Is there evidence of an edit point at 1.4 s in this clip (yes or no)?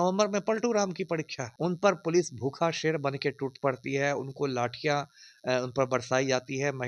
yes